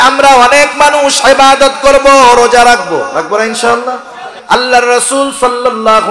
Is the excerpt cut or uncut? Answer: cut